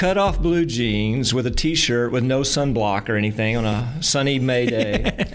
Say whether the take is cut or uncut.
uncut